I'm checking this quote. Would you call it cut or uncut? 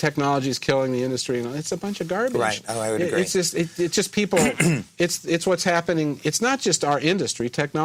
uncut